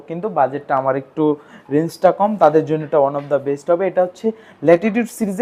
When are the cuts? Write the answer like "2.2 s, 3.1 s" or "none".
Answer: none